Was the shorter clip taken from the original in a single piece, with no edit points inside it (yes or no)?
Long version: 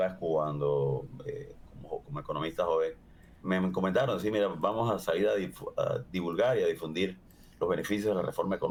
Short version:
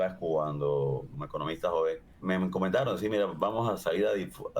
no